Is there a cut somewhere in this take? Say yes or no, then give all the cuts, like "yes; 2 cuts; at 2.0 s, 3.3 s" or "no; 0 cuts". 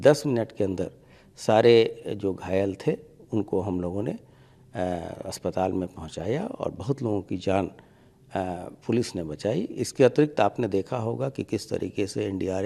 no; 0 cuts